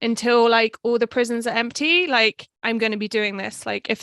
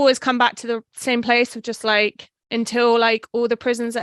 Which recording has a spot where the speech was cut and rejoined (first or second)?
first